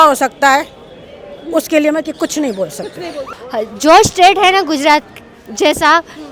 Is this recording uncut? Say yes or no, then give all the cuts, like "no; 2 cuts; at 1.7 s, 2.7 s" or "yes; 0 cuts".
no; 1 cut; at 3.3 s